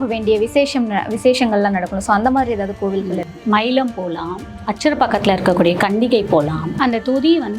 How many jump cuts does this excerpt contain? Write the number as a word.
one